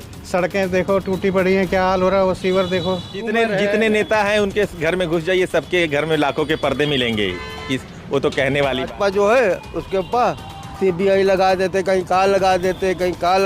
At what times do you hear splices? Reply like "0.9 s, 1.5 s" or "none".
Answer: 3.1 s, 8.9 s